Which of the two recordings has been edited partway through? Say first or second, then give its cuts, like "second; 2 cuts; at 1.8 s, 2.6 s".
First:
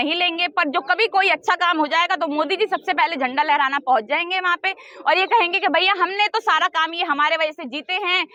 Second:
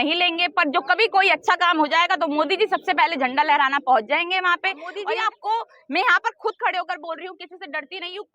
second; 1 cut; at 4.9 s